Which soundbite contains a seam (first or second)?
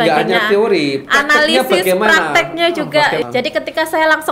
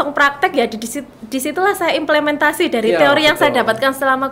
first